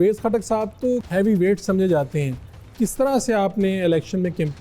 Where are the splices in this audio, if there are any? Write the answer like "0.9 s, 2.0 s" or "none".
1.0 s